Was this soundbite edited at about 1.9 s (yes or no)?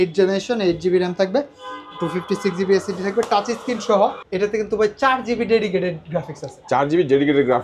no